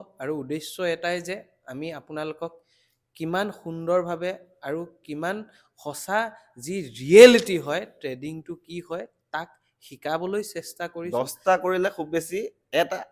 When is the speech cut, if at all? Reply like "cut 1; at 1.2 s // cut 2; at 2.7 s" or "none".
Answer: cut 1; at 11.0 s